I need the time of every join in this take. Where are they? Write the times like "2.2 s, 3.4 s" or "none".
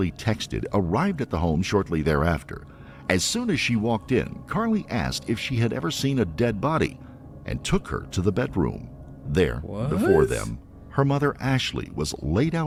none